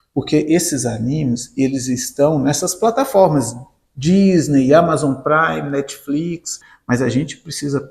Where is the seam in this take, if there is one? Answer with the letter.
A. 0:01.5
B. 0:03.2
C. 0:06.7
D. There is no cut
C